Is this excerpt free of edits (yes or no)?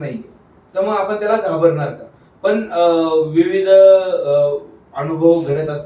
yes